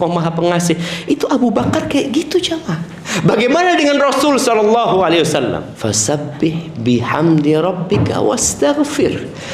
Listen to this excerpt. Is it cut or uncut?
cut